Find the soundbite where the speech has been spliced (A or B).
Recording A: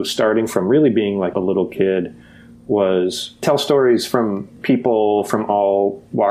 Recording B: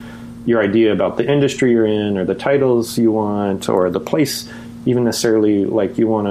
A